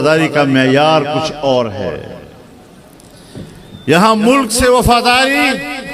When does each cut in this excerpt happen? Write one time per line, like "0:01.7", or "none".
none